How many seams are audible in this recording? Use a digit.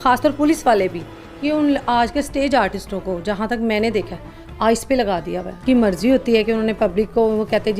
1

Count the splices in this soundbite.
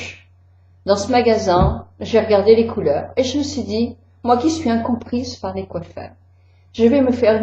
1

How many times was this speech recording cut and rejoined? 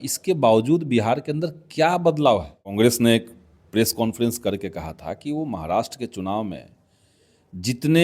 1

